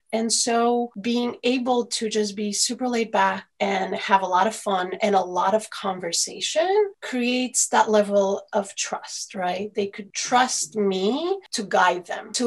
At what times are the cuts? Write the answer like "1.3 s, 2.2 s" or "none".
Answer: 0.9 s